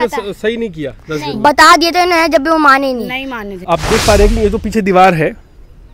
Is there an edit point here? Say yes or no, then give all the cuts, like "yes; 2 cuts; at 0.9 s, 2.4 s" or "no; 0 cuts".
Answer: yes; 1 cut; at 3.5 s